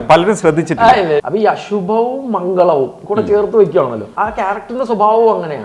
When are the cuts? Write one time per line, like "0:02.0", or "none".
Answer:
0:01.2
0:04.1